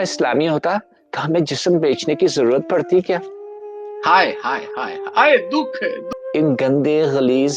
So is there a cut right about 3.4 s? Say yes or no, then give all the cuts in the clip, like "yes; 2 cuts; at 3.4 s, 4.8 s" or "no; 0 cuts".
no; 1 cut; at 6.1 s